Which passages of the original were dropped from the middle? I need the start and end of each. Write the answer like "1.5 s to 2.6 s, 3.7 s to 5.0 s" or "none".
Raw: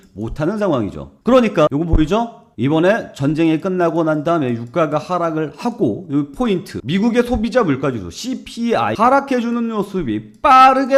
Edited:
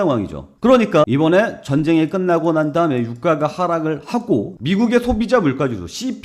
1.7 s to 2.6 s, 6.0 s to 6.7 s